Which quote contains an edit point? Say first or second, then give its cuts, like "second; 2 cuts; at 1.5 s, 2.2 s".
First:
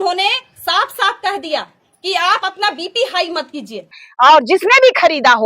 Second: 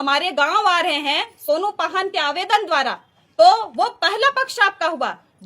first; 1 cut; at 4.0 s